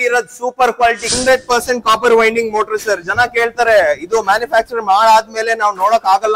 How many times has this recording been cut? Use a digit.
1